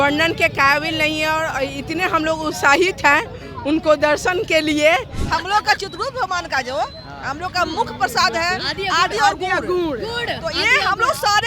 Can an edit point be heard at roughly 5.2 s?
yes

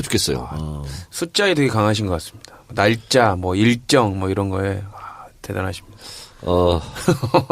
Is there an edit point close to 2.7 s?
yes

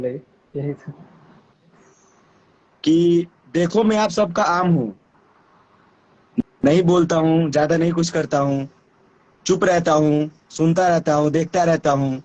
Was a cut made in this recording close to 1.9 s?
yes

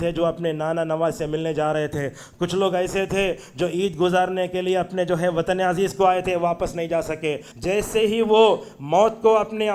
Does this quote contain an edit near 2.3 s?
no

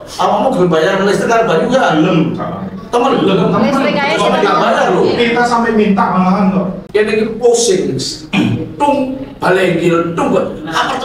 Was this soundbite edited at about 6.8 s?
yes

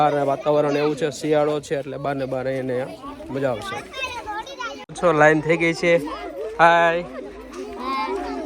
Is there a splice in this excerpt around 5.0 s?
yes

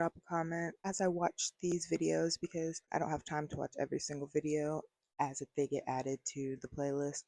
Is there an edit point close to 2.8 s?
yes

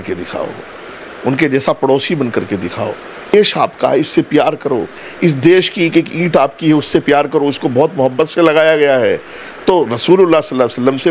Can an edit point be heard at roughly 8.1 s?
no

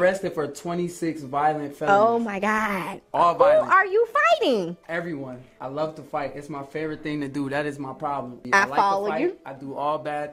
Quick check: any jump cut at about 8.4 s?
yes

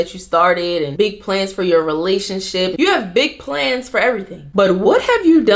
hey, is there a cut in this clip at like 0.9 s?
yes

